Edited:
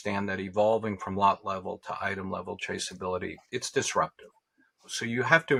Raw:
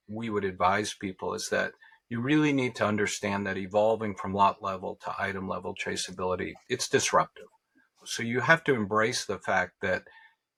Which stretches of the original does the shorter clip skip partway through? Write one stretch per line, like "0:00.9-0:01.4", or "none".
none

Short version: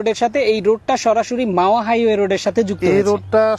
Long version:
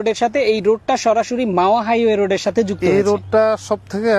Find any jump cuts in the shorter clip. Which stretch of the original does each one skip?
none

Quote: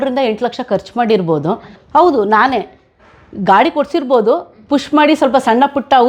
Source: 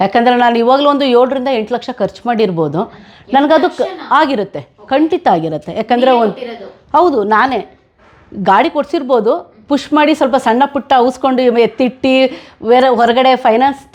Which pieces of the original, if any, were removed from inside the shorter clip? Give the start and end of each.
0:03.0-0:06.7

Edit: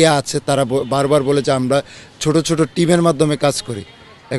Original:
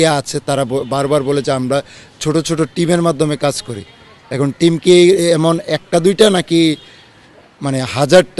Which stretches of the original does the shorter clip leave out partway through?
none

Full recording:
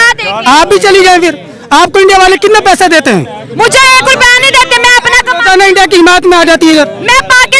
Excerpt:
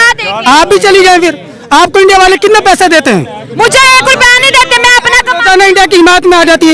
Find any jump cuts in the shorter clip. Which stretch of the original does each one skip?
none

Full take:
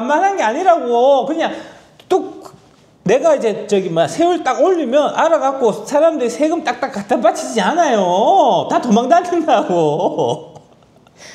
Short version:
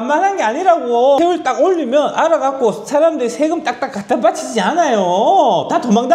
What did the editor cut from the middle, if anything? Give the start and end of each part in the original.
0:01.2-0:04.2

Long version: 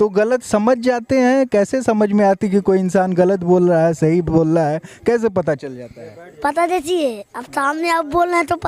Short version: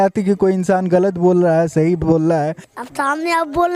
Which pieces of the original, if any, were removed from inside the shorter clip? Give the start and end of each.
0:04.9-0:07.2

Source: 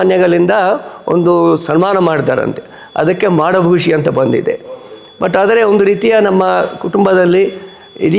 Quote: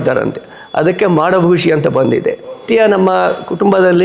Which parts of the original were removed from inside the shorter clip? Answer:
0:04.9-0:06.0

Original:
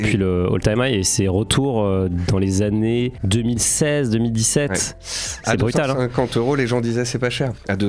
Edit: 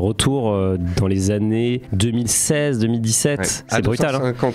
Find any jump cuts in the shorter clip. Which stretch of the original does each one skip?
0:04.9-0:05.3

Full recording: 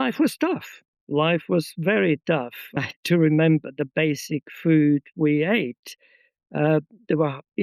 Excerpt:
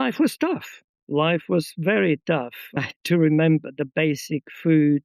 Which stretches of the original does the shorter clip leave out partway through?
none

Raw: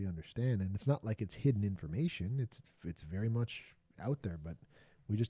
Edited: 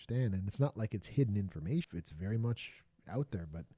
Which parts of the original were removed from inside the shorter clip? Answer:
0:02.2-0:02.8

